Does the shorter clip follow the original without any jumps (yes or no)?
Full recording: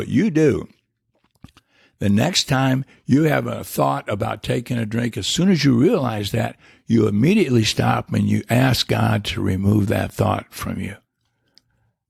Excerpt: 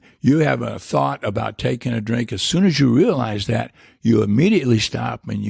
yes